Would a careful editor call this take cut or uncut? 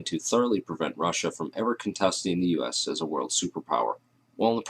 cut